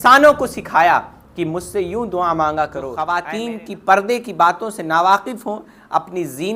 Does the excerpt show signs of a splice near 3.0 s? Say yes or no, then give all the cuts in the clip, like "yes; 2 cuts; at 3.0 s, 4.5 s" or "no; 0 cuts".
yes; 1 cut; at 3.0 s